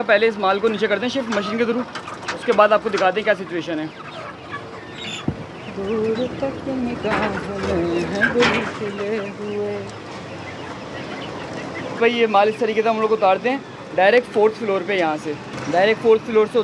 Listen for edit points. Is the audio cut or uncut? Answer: uncut